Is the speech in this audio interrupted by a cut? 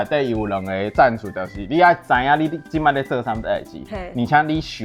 no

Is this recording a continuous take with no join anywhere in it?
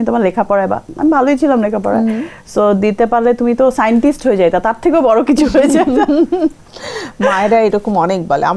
yes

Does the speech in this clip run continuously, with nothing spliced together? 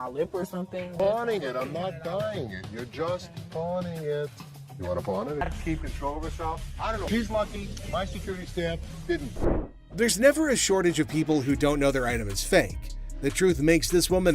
no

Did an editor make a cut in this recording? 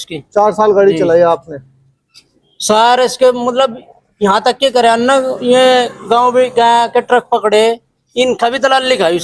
no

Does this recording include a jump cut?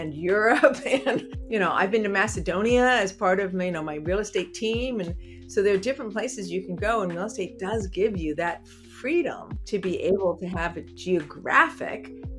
yes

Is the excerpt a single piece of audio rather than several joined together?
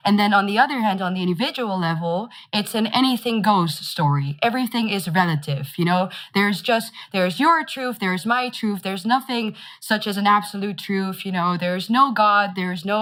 yes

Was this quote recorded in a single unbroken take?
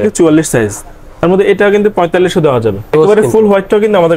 no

